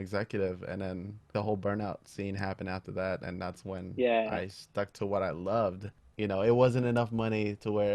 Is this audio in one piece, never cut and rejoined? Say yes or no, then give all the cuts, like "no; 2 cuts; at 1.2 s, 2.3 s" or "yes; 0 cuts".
no; 2 cuts; at 1.3 s, 6.0 s